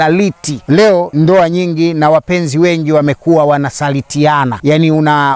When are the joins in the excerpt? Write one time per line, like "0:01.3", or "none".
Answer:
0:01.0
0:04.5